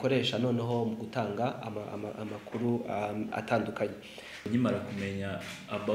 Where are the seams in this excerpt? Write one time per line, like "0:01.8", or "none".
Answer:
0:04.5